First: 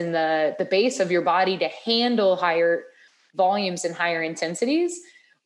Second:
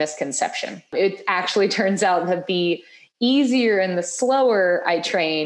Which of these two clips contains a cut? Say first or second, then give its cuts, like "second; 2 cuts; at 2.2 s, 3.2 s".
second; 1 cut; at 0.9 s